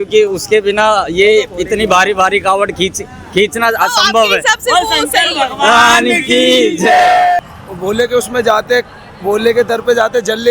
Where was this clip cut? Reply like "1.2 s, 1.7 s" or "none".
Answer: 7.4 s